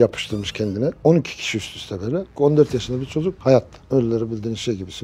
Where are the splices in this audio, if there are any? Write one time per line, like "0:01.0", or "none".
0:03.8